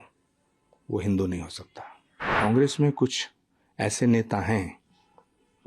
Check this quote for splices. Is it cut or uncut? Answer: cut